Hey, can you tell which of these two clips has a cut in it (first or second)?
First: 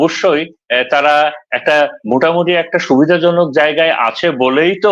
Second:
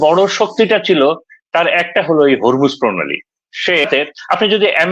second